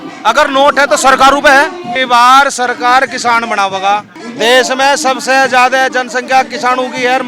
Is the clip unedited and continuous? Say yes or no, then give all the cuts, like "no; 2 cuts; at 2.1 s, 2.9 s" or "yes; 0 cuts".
no; 2 cuts; at 1.9 s, 4.2 s